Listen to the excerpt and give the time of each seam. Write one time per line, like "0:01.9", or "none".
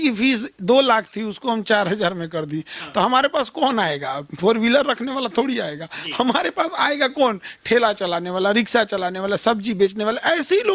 none